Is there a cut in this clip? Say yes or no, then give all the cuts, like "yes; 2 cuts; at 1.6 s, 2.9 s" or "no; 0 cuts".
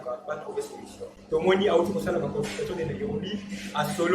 yes; 1 cut; at 1.1 s